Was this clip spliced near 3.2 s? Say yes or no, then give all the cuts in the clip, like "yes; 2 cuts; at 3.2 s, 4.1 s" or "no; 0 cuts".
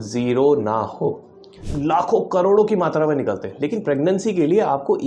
no; 1 cut; at 1.6 s